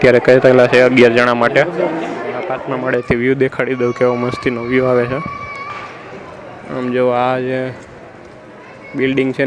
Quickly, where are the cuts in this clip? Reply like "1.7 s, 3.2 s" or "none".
2.5 s